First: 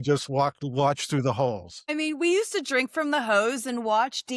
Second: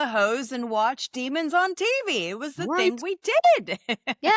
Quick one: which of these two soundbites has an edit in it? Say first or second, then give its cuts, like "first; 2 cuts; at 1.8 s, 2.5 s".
first; 1 cut; at 1.8 s